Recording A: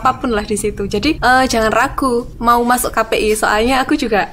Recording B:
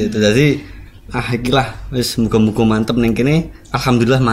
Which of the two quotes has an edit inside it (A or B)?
A